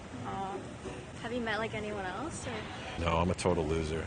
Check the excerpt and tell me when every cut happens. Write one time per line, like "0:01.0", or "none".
0:03.0